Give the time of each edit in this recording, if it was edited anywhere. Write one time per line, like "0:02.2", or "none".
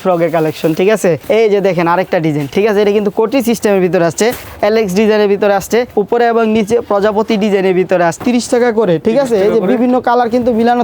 0:01.2
0:02.5
0:04.4
0:05.9
0:08.2